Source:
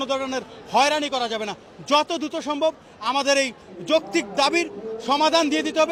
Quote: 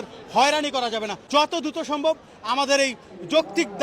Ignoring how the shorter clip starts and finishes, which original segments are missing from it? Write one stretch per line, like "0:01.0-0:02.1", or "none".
0:01.5-0:01.7